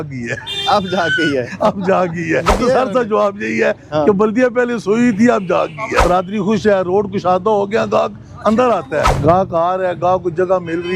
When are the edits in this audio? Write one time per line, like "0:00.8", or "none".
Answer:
0:02.5
0:06.0
0:09.1